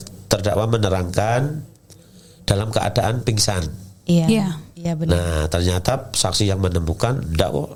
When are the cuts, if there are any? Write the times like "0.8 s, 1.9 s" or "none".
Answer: none